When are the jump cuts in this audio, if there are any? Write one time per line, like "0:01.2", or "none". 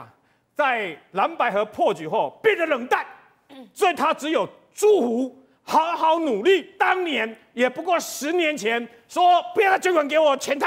0:06.7